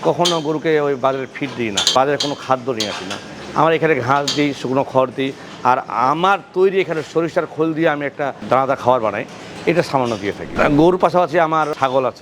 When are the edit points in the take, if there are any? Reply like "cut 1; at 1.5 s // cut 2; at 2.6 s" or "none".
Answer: cut 1; at 8.4 s // cut 2; at 10.5 s